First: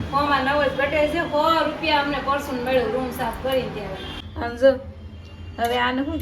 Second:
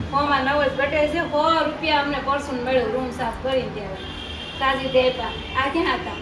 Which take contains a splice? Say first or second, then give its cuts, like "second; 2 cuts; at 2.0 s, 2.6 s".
first; 1 cut; at 4.2 s